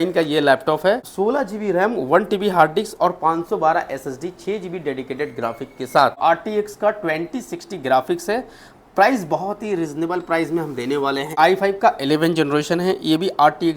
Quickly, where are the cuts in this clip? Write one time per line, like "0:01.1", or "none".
0:01.1
0:06.2
0:11.3